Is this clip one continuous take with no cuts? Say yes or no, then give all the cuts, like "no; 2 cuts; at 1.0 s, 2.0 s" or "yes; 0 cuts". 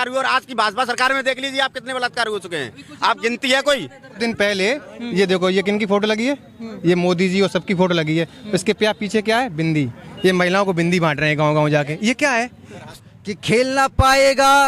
no; 2 cuts; at 4.2 s, 12.9 s